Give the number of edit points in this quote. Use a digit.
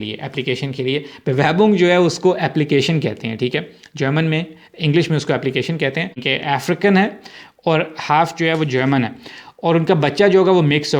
1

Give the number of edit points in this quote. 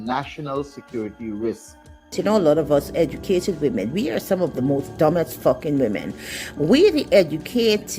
1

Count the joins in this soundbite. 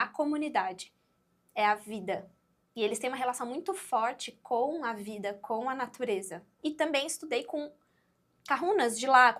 1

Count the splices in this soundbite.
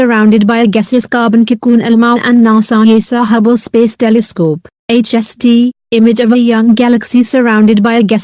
0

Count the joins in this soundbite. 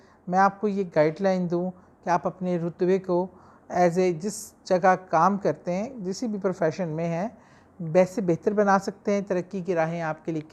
0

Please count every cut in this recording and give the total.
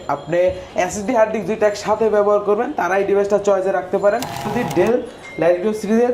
1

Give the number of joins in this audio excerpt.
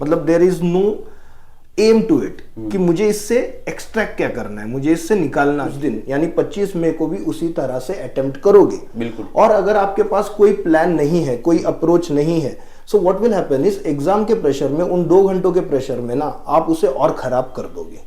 1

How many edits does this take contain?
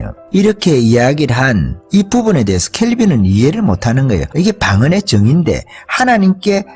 1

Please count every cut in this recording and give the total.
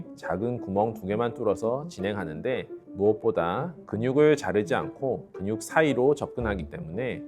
1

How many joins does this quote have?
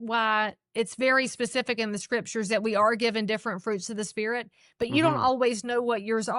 0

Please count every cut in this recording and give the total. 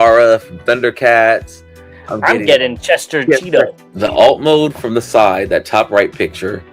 1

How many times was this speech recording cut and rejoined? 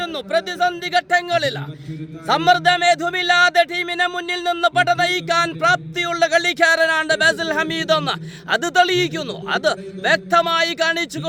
0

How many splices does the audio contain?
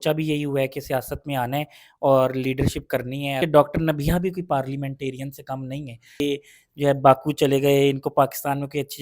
2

